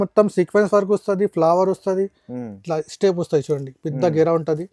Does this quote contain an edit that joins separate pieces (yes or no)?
no